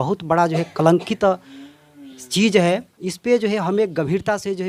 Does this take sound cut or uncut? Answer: uncut